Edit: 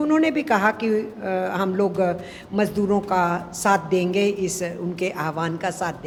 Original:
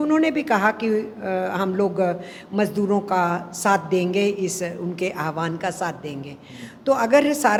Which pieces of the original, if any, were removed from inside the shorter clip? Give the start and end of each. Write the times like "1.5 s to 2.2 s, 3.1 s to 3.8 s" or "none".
none